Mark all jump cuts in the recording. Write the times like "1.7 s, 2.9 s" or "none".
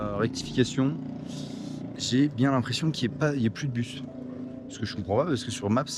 none